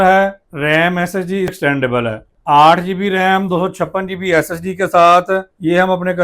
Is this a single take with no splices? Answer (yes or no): no